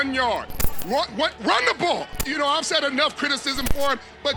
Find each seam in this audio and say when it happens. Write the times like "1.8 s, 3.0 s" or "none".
2.2 s